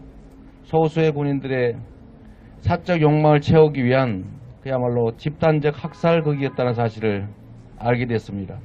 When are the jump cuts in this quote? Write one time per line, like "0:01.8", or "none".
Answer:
none

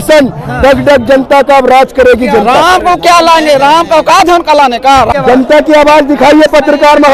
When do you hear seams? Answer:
0:02.4
0:05.1

